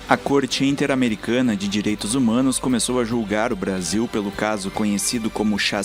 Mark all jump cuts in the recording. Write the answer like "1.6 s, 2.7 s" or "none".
none

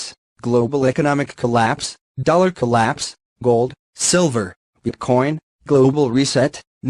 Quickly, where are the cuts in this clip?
none

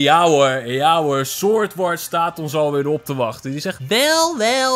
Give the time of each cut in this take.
3.7 s

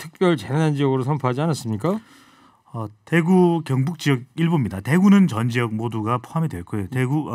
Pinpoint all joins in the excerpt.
none

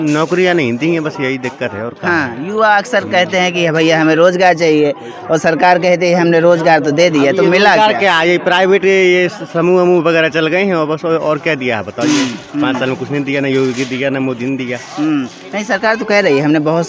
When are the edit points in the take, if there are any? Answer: none

